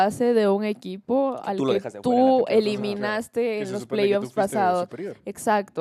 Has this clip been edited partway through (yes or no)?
no